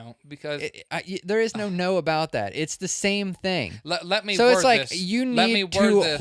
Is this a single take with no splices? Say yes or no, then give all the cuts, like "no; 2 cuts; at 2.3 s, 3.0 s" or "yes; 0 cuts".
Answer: yes; 0 cuts